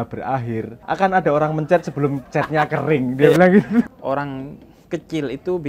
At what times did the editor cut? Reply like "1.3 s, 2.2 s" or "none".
3.9 s